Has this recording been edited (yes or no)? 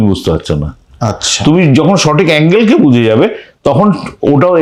no